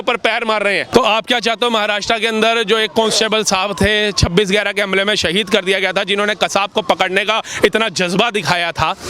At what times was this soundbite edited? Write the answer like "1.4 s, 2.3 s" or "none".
0.9 s